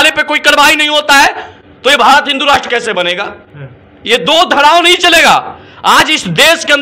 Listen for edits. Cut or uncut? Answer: uncut